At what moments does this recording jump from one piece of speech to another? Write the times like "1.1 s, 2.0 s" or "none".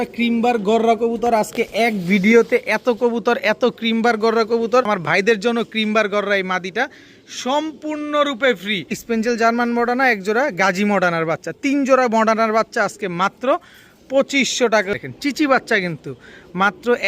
4.9 s, 8.9 s, 14.9 s